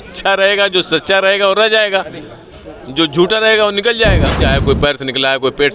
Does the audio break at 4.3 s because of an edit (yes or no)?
yes